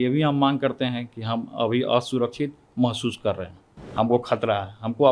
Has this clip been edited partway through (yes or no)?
yes